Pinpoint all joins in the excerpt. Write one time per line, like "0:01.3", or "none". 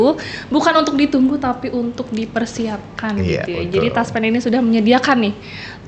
none

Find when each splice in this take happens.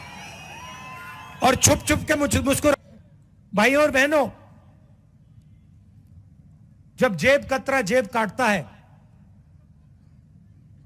0:02.7

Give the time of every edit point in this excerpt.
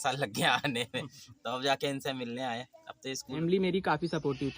0:03.4

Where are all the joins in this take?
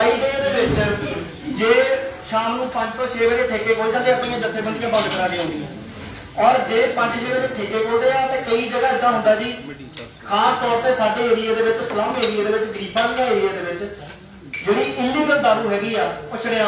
none

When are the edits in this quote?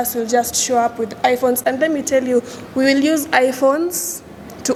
none

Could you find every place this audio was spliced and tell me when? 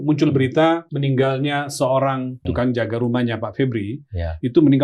0:00.9
0:02.5

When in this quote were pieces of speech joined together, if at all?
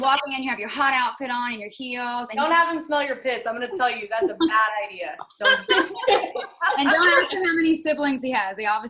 0:02.3

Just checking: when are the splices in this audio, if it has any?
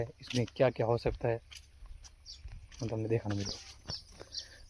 none

